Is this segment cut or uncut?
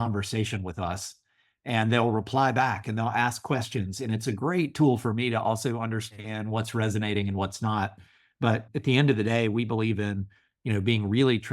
cut